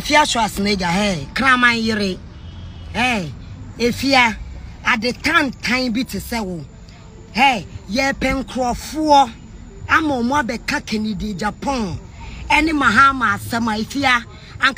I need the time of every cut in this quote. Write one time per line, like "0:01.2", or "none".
none